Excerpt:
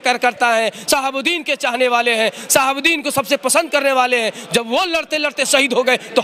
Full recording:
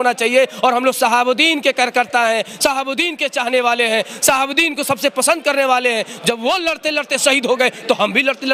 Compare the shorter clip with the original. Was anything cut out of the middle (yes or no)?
no